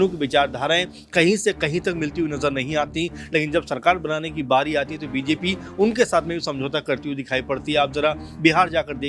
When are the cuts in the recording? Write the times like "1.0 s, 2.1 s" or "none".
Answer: none

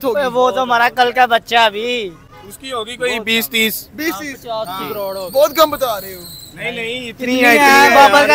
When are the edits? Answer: none

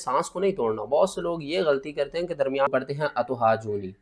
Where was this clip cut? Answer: 2.7 s

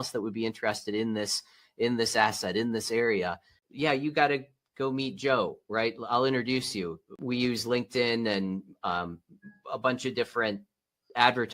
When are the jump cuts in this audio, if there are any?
3.5 s, 7.2 s

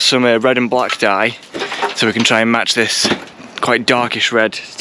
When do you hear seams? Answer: none

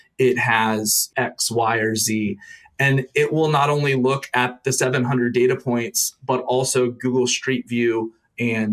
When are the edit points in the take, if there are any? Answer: 1.0 s

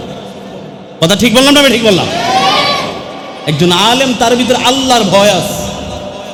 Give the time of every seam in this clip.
none

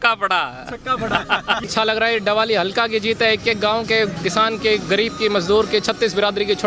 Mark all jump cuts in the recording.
1.7 s

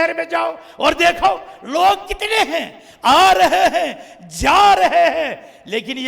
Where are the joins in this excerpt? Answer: none

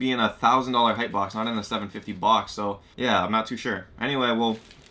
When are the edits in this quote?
2.9 s

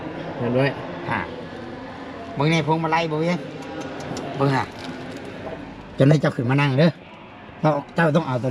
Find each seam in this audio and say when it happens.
none

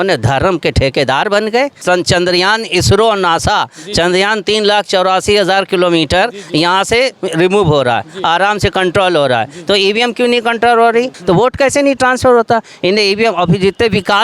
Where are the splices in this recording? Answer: 1.8 s, 11.1 s

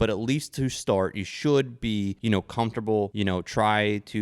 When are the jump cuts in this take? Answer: 2.2 s, 3.1 s

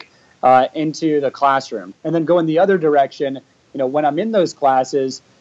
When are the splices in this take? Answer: 1.8 s

